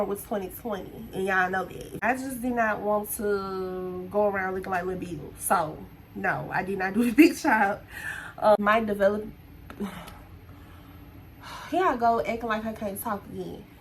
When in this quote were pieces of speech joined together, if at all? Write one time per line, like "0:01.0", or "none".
0:02.0
0:08.6